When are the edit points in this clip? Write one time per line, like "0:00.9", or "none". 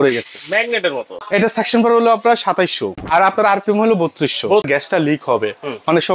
0:01.2
0:03.0
0:04.7